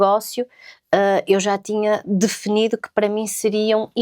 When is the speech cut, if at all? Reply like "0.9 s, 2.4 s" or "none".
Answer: none